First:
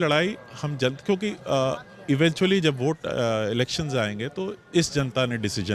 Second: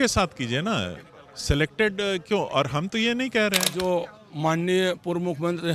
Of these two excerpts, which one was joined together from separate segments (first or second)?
second